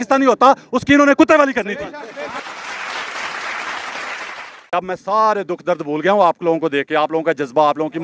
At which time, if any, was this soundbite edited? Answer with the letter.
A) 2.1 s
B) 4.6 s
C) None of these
B